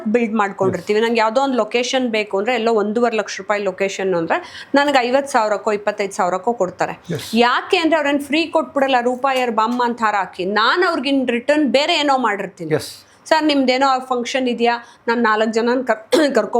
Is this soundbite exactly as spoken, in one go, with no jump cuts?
yes; 0 cuts

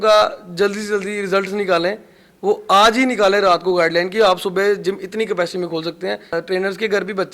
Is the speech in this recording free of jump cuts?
no; 1 cut; at 6.3 s

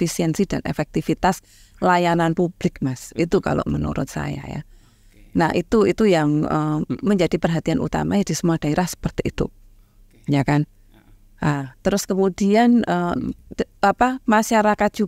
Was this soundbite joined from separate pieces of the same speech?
no; 0 cuts

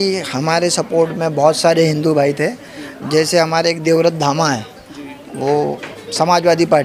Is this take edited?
no; 0 cuts

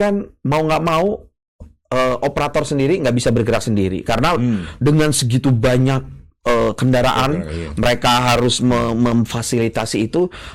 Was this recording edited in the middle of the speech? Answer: no; 0 cuts

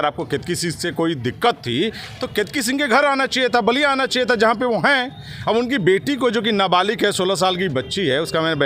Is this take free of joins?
yes; 0 cuts

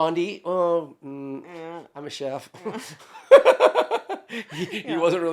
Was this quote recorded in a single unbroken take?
yes; 0 cuts

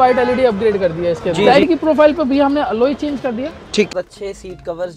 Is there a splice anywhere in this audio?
yes; 2 cuts; at 1.5 s, 3.9 s

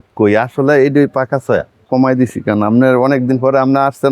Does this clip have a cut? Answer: yes; 1 cut; at 1.8 s

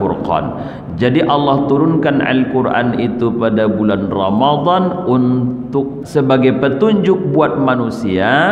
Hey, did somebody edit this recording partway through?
yes; 1 cut; at 6.0 s

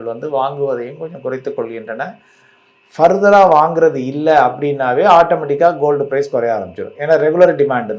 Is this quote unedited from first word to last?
yes; 0 cuts

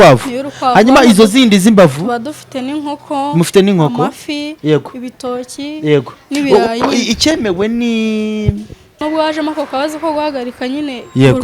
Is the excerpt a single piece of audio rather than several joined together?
no; 1 cut; at 8.9 s

